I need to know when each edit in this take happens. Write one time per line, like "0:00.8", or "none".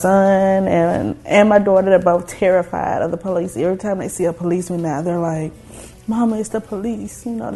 none

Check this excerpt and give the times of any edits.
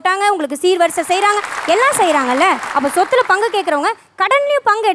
0:02.7

